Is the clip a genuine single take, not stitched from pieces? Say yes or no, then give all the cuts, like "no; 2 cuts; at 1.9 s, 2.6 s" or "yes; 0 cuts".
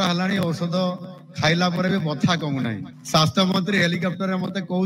no; 1 cut; at 2.9 s